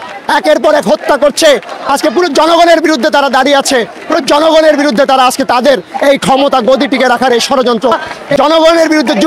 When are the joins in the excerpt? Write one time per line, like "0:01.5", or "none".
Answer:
0:08.1